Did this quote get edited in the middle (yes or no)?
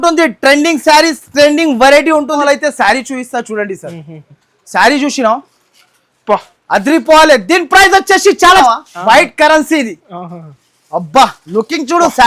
yes